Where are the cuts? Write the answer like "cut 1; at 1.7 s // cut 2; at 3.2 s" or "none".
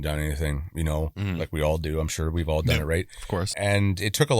cut 1; at 3.5 s

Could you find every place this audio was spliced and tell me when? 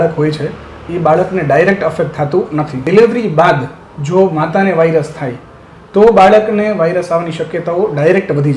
cut 1; at 2.8 s

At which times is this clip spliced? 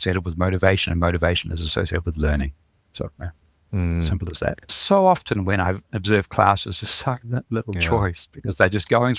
cut 1; at 4.7 s // cut 2; at 5.9 s

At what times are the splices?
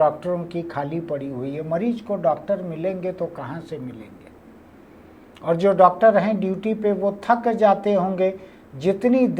none

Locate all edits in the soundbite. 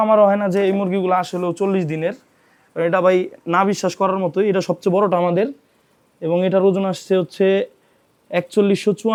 none

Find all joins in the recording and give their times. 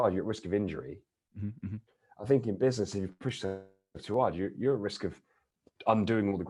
none

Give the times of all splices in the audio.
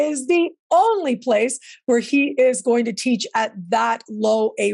none

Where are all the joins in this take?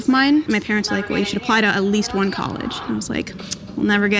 none

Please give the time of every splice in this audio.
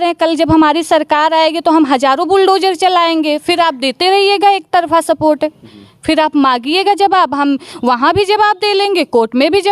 none

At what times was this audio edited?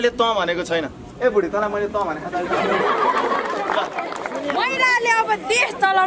cut 1; at 4.4 s

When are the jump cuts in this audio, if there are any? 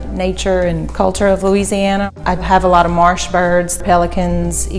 cut 1; at 2.0 s // cut 2; at 3.8 s

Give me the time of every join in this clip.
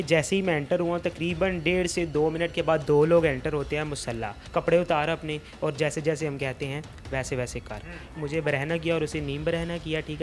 cut 1; at 4.3 s // cut 2; at 8.0 s

